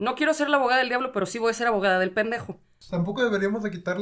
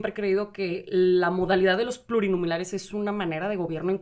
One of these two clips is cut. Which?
first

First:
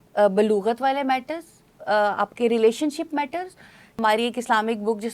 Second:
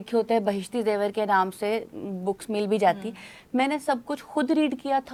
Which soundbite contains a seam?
first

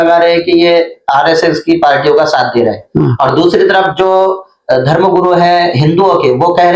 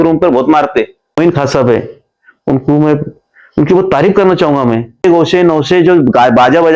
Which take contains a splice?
second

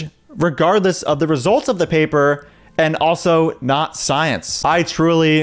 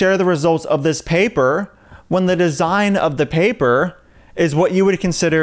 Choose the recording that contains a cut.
first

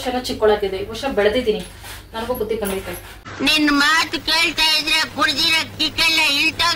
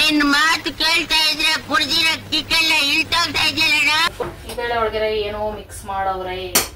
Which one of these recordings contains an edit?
second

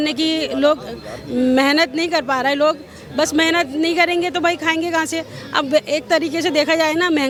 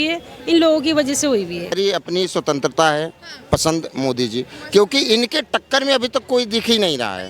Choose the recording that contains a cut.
second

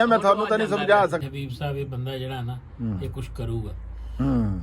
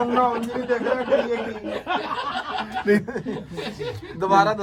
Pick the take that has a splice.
first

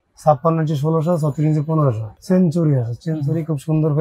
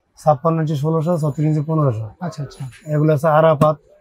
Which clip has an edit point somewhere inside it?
first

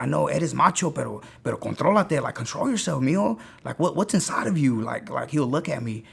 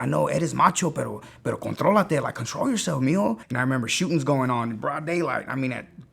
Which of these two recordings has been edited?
second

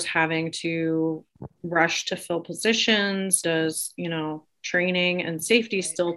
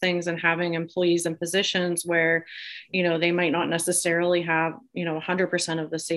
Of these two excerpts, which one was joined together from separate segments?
first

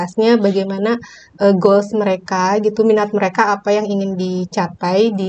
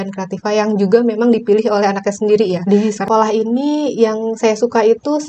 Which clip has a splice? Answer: second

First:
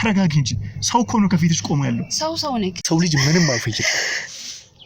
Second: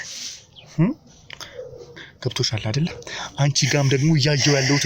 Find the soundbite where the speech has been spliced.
first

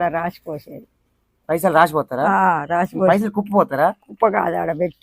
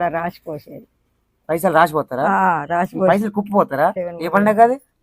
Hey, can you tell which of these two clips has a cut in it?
second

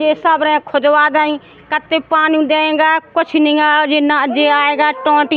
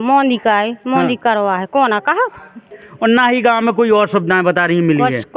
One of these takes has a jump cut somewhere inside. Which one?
second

